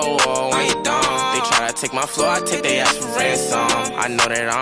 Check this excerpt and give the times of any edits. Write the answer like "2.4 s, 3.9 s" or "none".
none